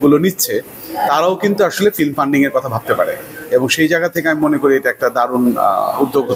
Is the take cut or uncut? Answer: uncut